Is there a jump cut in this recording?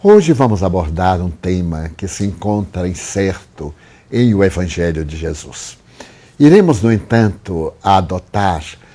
yes; 1 cut; at 7.0 s

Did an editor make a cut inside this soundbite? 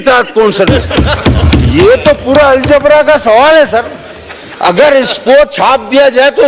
no; 0 cuts

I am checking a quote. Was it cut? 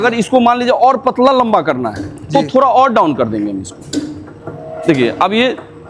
no; 0 cuts

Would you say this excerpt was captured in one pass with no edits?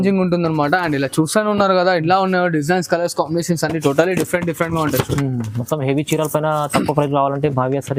yes; 0 cuts

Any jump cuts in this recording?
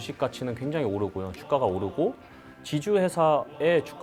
no; 0 cuts

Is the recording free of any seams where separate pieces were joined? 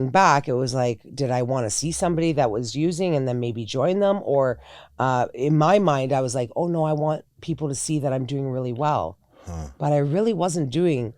yes; 0 cuts

